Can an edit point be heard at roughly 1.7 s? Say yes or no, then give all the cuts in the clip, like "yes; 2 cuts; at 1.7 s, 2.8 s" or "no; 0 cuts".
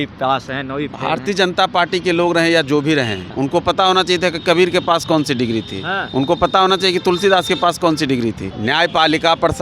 no; 2 cuts; at 3.2 s, 8.5 s